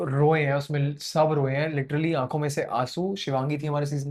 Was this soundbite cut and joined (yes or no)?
no